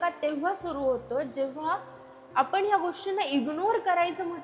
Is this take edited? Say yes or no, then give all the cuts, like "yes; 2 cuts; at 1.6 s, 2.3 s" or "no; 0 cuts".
no; 0 cuts